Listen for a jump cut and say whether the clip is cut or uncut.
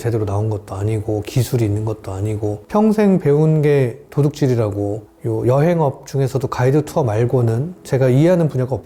uncut